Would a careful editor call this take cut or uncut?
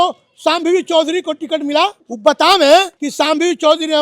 cut